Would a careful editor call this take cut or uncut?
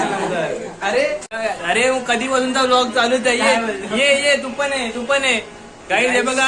cut